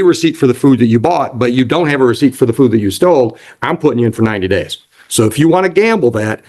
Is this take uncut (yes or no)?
yes